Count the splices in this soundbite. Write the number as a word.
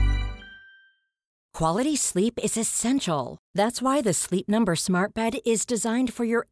one